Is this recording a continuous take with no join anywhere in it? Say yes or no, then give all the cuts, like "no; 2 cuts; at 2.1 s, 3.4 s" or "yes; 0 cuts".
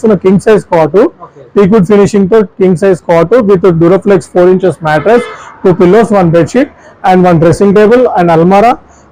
yes; 0 cuts